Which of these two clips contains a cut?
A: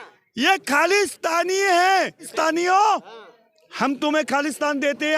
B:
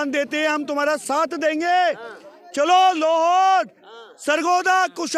A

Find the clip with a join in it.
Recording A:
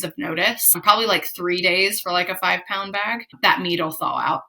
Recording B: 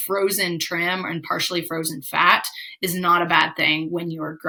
A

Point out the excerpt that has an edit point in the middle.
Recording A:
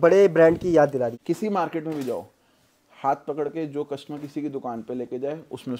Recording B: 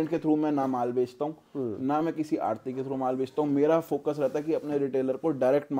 A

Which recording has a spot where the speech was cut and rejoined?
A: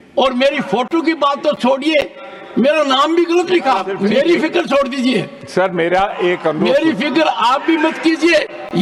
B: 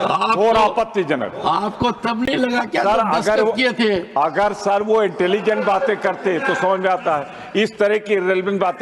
A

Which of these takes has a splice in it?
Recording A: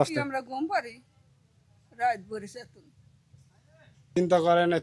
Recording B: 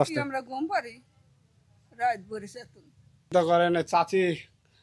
B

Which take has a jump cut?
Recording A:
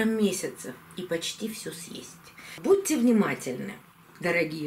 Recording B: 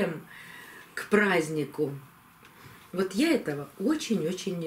A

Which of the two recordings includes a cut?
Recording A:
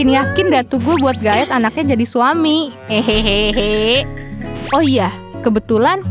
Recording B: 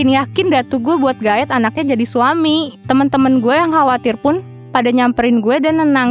B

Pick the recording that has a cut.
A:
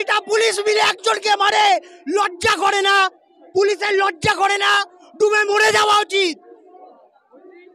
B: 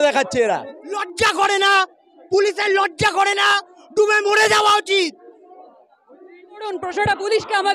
B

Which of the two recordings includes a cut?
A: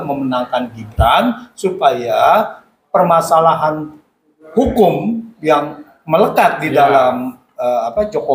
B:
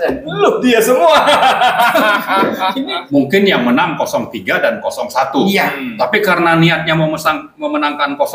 B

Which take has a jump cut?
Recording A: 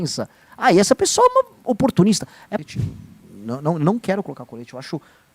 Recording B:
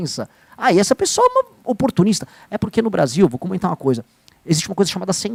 A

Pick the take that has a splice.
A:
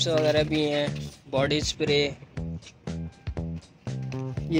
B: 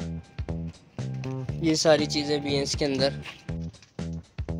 B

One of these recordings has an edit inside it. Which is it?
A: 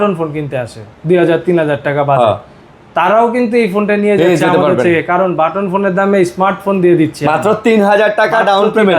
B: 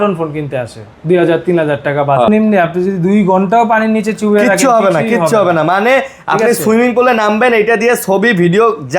B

